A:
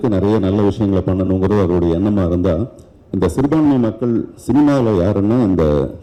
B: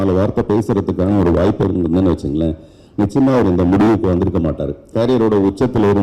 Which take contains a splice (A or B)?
B